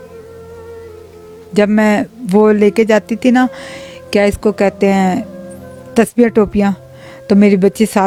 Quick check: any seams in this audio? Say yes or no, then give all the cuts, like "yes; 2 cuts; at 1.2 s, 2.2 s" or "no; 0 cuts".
no; 0 cuts